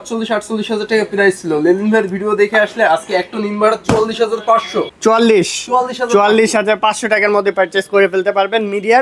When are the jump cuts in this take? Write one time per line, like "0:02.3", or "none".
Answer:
none

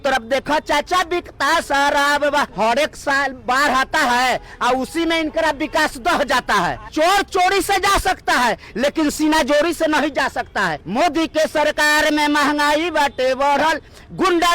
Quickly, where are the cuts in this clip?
0:02.5
0:06.9
0:10.8

